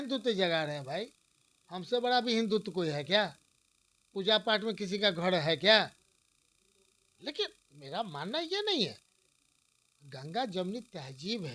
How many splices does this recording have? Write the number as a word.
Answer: zero